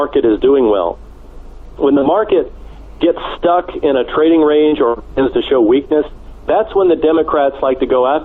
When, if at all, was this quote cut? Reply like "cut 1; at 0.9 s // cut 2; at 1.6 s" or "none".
none